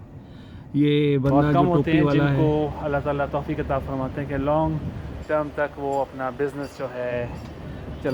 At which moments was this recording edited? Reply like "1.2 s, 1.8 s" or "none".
2.4 s